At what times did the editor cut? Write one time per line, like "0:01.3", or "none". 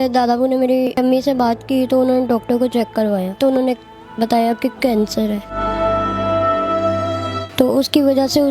0:00.9
0:03.4